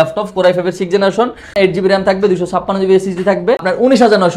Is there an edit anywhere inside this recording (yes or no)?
yes